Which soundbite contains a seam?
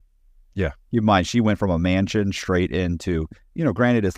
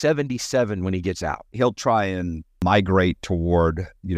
second; 2 cuts; at 1.4 s, 2.6 s

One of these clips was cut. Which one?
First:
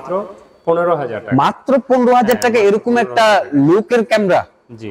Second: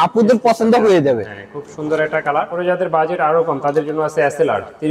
second; 1 cut; at 2.5 s

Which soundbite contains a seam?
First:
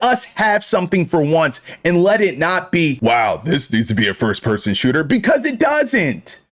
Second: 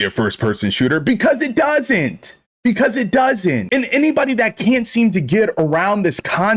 second; 1 cut; at 3.6 s

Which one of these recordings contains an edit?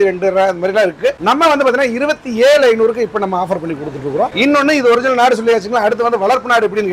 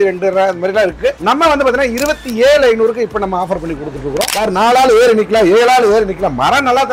second; 1 cut; at 4.3 s

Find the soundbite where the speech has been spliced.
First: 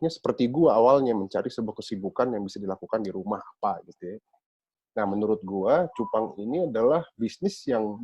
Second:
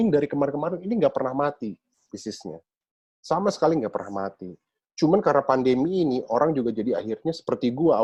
first; 1 cut; at 4.7 s

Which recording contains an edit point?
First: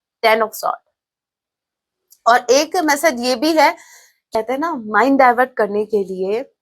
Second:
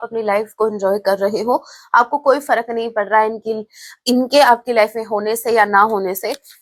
first; 1 cut; at 4.1 s

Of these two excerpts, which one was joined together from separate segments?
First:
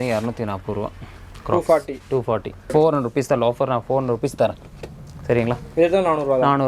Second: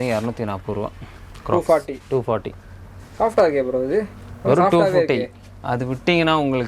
first; 1 cut; at 2.6 s

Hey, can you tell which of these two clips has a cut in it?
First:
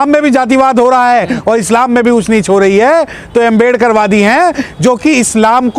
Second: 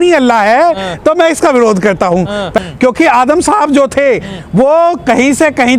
second; 1 cut; at 2.5 s

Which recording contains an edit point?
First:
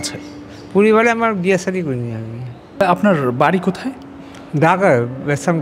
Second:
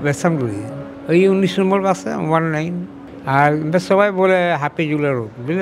first; 1 cut; at 2.6 s

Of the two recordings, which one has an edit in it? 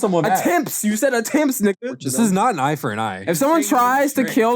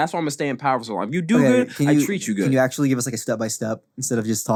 first; 2 cuts; at 1.9 s, 3.3 s

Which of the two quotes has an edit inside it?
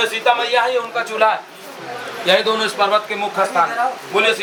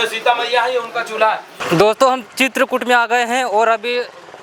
second; 1 cut; at 1.6 s

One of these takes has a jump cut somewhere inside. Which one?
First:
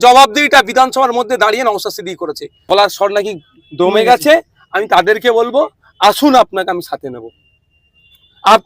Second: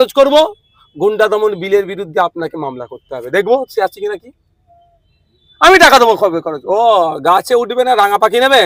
first; 1 cut; at 2.5 s

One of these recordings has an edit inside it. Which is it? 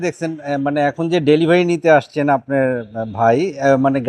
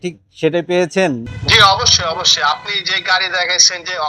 second; 1 cut; at 1.2 s

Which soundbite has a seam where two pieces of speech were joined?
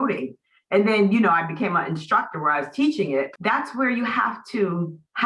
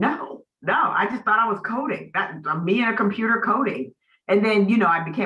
first; 1 cut; at 3.3 s

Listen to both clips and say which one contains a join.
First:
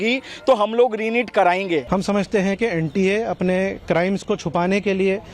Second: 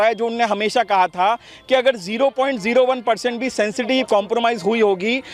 first; 1 cut; at 1.8 s

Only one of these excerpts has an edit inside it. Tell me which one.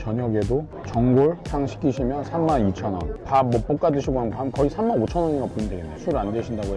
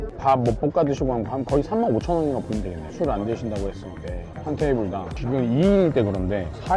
first; 1 cut; at 1.4 s

